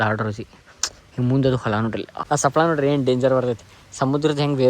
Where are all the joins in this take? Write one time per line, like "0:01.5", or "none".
0:02.1

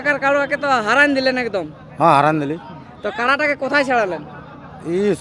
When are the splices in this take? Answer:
none

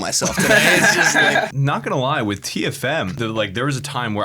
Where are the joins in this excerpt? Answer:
0:01.5
0:03.1

